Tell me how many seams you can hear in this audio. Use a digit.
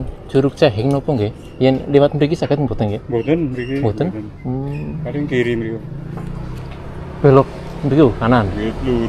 0